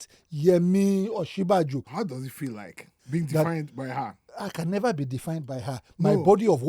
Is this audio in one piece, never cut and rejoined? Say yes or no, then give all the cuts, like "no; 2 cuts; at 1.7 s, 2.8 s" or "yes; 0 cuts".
no; 3 cuts; at 1.9 s, 2.9 s, 4.2 s